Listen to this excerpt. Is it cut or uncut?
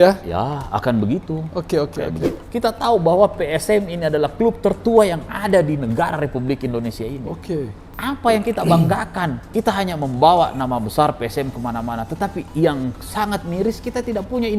cut